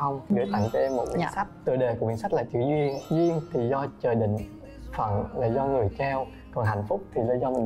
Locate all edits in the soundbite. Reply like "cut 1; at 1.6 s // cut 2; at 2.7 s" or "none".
cut 1; at 1.4 s